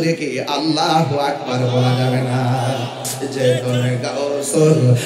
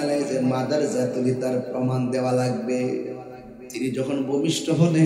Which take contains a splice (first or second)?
first